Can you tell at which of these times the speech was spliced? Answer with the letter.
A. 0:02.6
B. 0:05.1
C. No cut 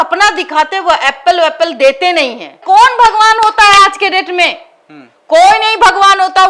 A